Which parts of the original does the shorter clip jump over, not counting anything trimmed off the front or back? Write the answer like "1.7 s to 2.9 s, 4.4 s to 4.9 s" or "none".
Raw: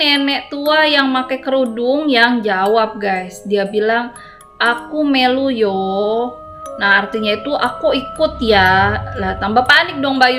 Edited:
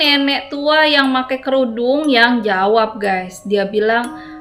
none